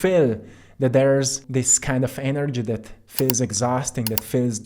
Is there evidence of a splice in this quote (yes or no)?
yes